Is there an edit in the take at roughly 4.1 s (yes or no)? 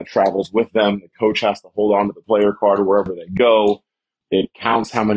yes